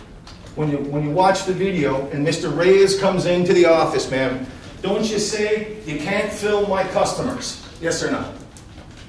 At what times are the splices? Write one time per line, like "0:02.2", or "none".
none